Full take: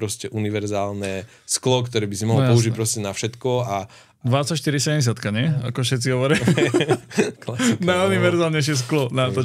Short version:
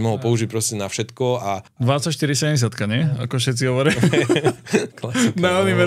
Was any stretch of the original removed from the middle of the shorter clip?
yes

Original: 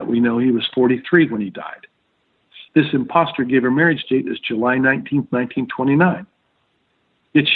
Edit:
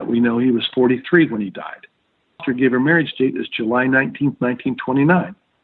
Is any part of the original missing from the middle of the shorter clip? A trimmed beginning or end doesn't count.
yes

